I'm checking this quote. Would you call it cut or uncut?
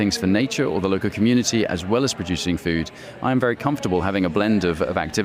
uncut